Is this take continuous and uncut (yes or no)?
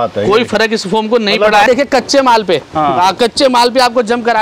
no